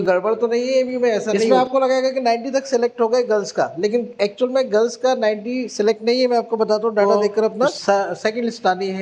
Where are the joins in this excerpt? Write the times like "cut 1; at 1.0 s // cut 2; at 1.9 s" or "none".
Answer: cut 1; at 1.5 s // cut 2; at 7.8 s